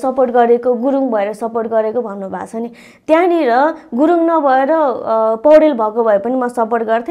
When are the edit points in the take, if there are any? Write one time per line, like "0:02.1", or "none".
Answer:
none